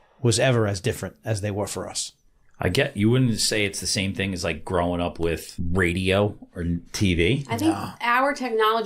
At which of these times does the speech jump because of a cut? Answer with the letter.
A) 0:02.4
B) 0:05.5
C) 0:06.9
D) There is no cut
B